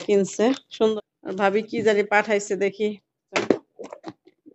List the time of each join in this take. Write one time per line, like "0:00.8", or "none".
0:00.9
0:03.4